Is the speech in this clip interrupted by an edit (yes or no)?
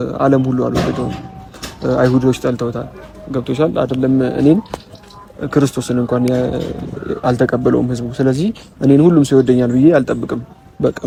no